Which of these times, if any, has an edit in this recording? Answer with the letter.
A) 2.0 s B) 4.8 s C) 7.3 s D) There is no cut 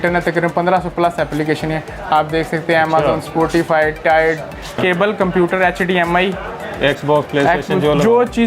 B